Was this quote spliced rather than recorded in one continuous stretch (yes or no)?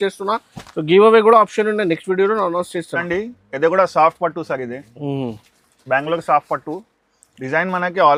no